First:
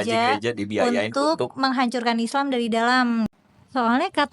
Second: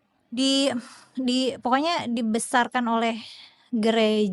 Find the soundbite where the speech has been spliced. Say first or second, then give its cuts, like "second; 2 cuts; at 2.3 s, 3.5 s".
first; 1 cut; at 3.3 s